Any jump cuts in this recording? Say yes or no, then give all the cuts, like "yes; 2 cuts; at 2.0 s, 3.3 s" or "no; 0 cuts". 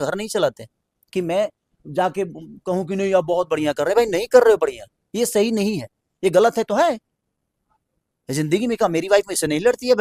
no; 0 cuts